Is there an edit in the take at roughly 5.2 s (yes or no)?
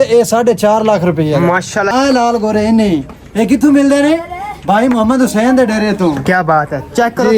no